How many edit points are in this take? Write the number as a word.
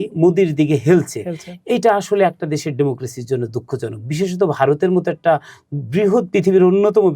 zero